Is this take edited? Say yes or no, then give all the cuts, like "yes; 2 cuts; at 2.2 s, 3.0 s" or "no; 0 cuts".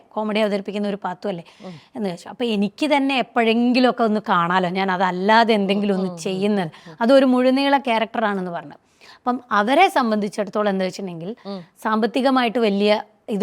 no; 0 cuts